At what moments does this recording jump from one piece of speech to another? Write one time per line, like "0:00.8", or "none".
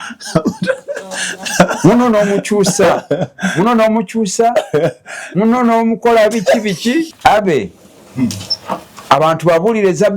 0:07.1